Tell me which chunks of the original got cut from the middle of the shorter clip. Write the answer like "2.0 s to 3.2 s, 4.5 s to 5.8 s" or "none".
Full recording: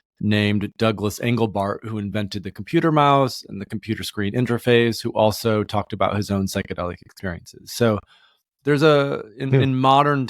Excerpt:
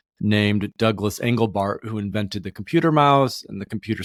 none